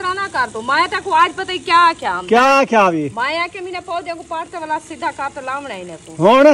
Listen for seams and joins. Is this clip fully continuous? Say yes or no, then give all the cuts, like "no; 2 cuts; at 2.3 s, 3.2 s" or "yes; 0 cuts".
yes; 0 cuts